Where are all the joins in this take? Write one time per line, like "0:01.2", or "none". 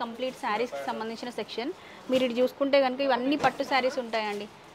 none

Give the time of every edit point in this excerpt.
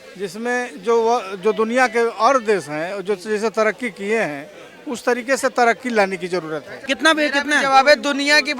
0:06.7

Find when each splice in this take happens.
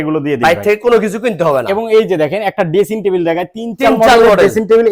none

